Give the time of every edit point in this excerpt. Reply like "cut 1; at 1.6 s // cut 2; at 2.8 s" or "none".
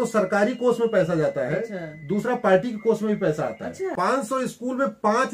cut 1; at 3.9 s

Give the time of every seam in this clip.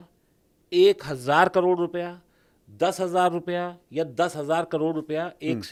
none

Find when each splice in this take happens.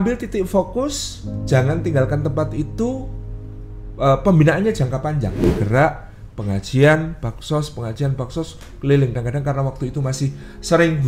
cut 1; at 5.4 s // cut 2; at 9.1 s

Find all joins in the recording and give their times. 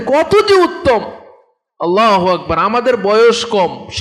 none

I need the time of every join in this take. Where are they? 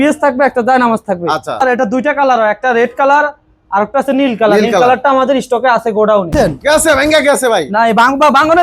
cut 1; at 1.6 s // cut 2; at 6.3 s

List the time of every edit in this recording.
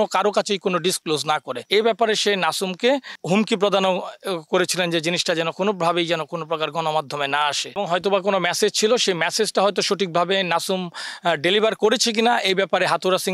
cut 1; at 1.5 s // cut 2; at 7.7 s

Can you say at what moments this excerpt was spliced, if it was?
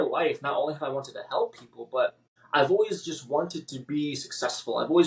cut 1; at 2.3 s

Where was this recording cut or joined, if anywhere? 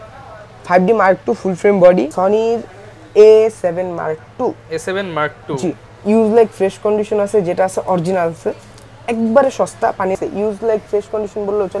cut 1; at 2.1 s // cut 2; at 10.2 s

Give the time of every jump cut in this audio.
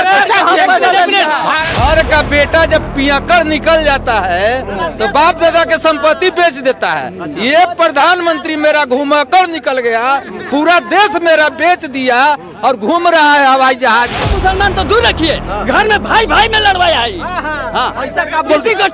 cut 1; at 1.7 s // cut 2; at 14.2 s

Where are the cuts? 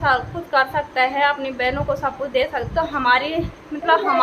none

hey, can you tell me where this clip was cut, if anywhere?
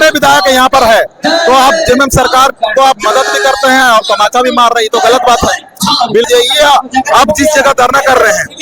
cut 1; at 6.3 s

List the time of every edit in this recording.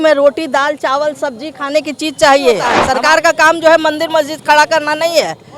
cut 1; at 2.8 s

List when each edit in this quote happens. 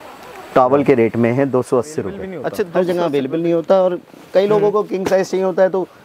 cut 1; at 2.6 s

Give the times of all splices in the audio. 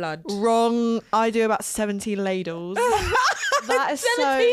none

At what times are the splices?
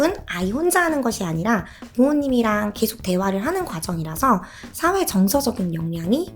none

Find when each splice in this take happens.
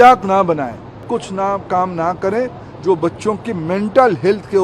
cut 1; at 1.1 s

